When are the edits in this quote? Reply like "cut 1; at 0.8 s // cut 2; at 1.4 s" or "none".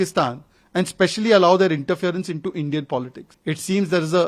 cut 1; at 3.2 s

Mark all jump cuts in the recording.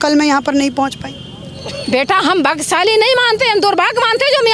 none

